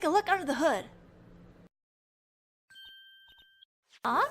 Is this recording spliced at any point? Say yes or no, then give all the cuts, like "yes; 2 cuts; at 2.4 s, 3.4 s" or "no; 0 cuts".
no; 0 cuts